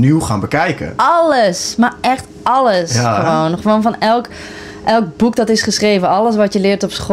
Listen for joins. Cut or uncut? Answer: uncut